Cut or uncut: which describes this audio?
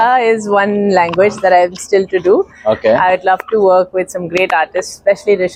uncut